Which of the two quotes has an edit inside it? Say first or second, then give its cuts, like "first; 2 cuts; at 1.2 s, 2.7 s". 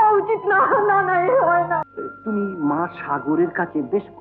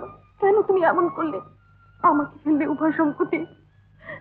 first; 1 cut; at 1.8 s